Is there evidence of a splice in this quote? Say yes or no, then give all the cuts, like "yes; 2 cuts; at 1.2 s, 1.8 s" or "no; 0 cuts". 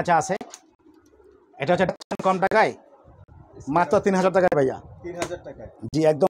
yes; 1 cut; at 1.9 s